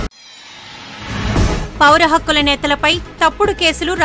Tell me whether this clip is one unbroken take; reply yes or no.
yes